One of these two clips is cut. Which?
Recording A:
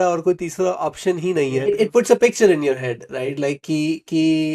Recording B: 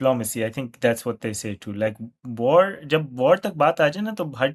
A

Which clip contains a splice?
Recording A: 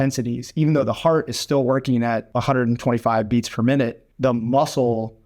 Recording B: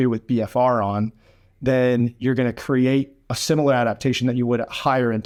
A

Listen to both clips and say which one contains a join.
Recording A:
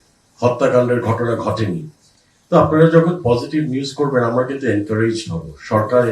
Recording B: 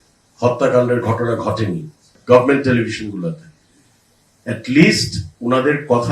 B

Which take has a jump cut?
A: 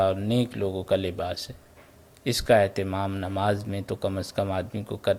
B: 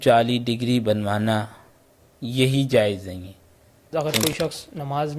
B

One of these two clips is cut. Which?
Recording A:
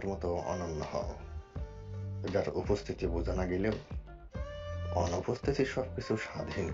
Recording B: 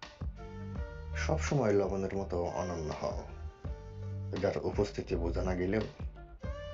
B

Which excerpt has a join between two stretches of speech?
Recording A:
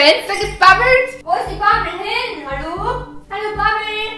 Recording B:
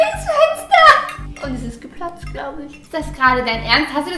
A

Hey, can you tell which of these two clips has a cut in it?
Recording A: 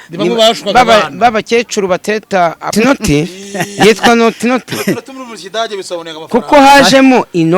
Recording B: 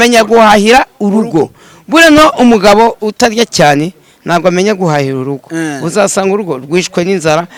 A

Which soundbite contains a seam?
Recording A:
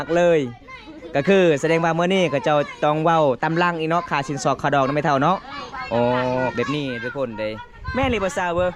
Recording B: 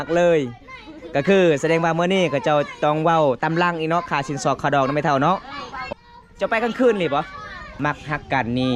B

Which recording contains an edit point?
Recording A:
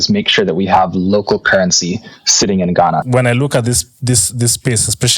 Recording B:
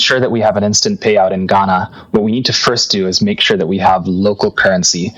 A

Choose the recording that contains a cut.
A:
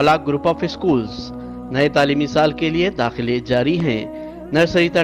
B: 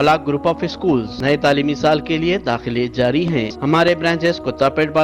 B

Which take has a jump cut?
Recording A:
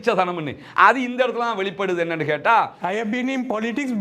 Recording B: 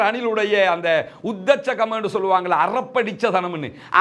A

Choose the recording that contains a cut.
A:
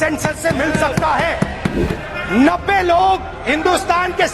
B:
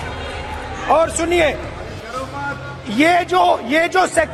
A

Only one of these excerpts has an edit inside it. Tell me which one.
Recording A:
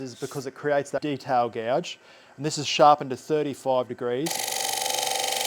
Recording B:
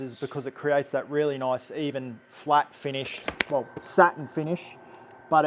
A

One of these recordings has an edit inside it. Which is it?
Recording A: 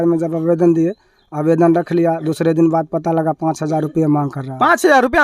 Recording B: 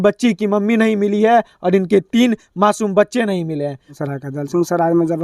B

